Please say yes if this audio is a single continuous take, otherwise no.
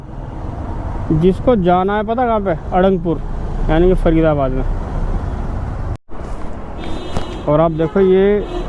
no